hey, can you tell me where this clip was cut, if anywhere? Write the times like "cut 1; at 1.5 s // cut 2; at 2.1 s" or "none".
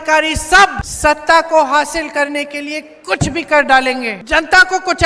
cut 1; at 0.9 s // cut 2; at 4.1 s